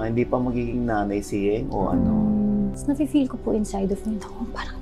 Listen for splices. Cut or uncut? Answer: cut